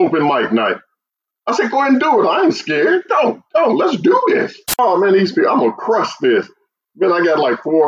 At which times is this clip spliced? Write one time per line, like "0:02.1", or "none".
0:04.6